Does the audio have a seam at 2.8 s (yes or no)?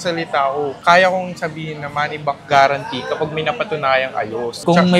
no